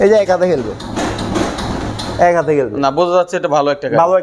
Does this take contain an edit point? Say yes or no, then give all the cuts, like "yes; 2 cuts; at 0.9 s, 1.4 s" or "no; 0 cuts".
no; 0 cuts